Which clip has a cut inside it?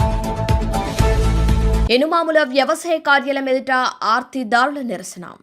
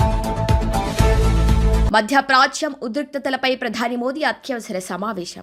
first; 1 cut; at 1.9 s

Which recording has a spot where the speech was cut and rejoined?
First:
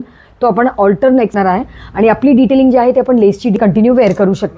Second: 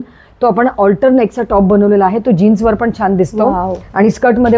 first; 2 cuts; at 1.3 s, 3.6 s

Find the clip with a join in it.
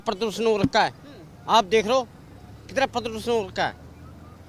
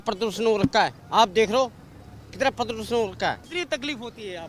second; 2 cuts; at 1.0 s, 3.5 s

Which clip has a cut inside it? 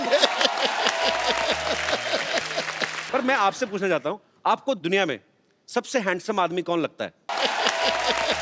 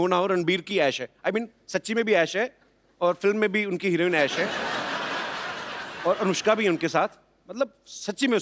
first; 2 cuts; at 3.0 s, 7.3 s

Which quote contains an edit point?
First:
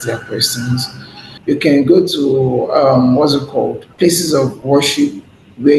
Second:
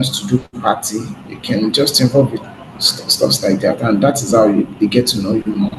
first; 1 cut; at 3.8 s

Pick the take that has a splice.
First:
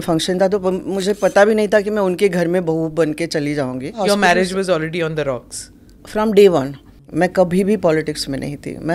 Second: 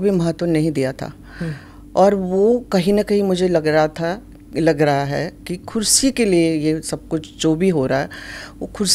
first; 2 cuts; at 4.0 s, 7.0 s

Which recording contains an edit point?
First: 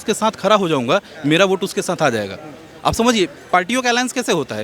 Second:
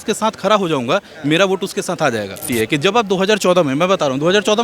second; 1 cut; at 2.5 s

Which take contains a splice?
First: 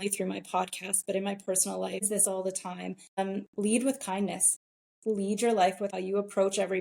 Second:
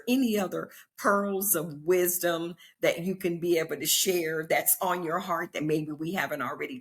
first; 3 cuts; at 2.0 s, 3.2 s, 5.9 s

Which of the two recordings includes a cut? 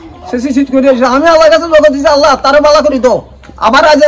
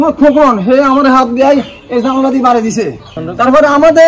second; 1 cut; at 3.2 s

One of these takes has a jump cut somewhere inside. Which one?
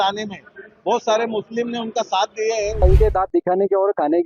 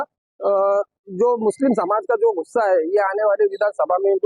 first; 1 cut; at 2.8 s

